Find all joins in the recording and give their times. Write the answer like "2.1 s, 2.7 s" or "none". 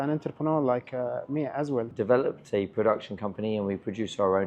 1.9 s